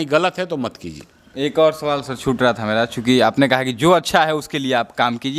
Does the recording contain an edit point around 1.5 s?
no; 0 cuts

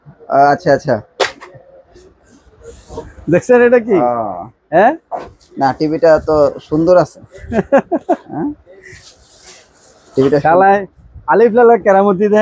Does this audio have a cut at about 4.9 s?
no; 0 cuts

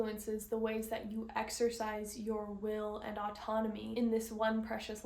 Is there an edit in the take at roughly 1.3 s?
no; 1 cut; at 3.9 s

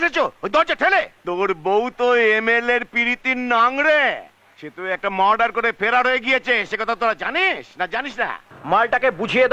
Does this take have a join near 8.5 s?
yes; 2 cuts; at 1.2 s, 8.5 s

